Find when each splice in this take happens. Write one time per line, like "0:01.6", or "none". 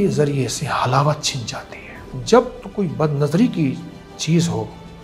0:02.1